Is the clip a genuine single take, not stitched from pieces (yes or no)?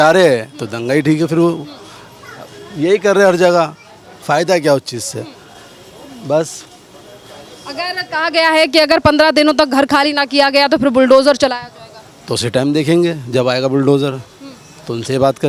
yes